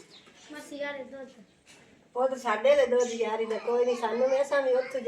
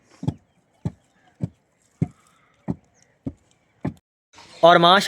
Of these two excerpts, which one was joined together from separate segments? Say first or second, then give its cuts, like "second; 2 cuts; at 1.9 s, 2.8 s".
second; 1 cut; at 4.1 s